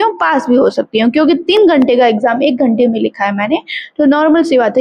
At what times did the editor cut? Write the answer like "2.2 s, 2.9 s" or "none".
none